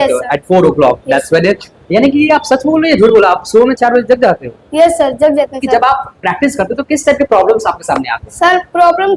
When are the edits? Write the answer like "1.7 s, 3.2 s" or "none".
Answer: 5.6 s